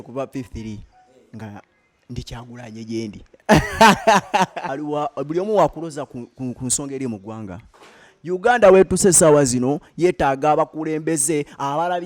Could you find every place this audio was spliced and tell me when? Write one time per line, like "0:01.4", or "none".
0:04.7